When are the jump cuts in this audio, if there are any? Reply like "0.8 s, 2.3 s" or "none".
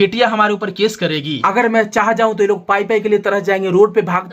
1.3 s